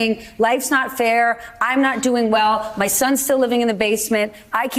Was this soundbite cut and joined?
no; 0 cuts

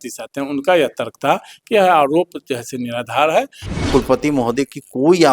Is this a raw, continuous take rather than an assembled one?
no; 1 cut; at 3.6 s

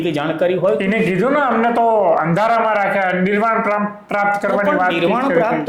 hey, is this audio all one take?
yes; 0 cuts

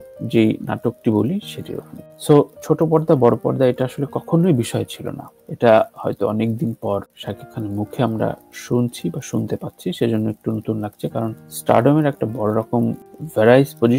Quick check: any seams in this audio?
no; 0 cuts

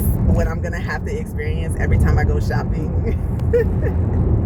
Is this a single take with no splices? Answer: yes; 0 cuts

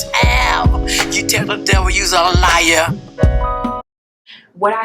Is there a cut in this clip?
yes; 1 cut; at 3.8 s

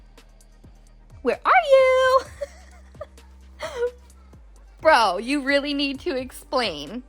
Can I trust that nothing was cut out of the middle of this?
no; 1 cut; at 1.2 s

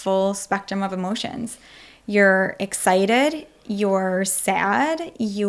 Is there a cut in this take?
no; 0 cuts

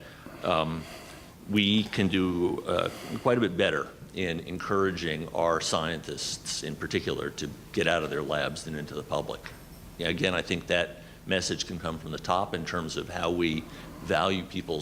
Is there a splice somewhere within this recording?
no; 0 cuts

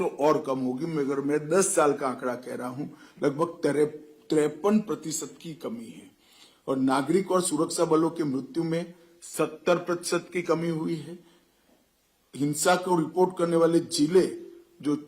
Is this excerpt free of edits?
yes; 0 cuts

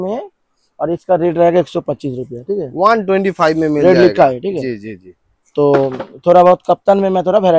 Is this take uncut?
yes; 0 cuts

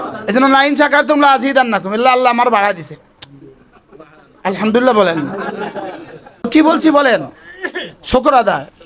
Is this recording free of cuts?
no; 1 cut; at 6.5 s

